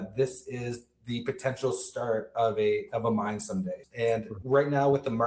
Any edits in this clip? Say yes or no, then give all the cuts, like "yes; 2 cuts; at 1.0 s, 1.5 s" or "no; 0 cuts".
yes; 1 cut; at 3.8 s